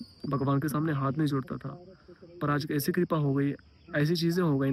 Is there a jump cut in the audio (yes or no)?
no